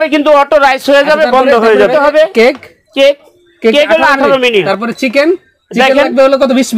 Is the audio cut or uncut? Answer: cut